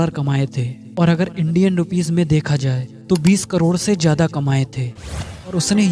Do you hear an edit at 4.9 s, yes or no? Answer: yes